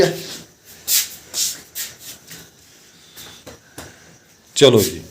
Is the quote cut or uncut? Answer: cut